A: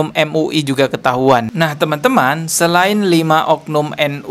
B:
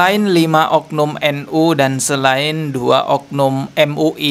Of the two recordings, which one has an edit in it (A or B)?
A